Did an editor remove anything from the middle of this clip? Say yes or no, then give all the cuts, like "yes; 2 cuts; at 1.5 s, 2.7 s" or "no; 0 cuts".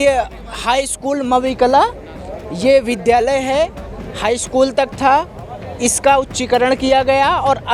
no; 0 cuts